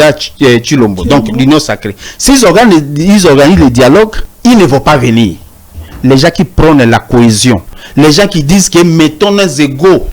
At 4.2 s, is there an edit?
yes; 2 cuts; at 4.2 s, 7.8 s

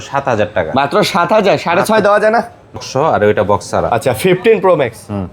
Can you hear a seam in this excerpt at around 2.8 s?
yes; 1 cut; at 2.8 s

